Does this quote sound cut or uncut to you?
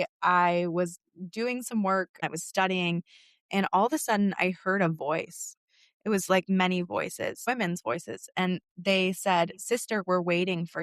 cut